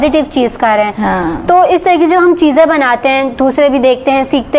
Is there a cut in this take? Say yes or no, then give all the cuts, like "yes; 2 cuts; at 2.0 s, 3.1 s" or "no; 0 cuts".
no; 0 cuts